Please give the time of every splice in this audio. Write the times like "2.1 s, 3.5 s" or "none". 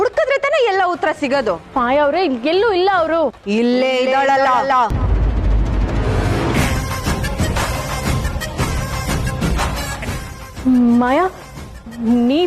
1.6 s, 4.9 s, 6.7 s, 10.5 s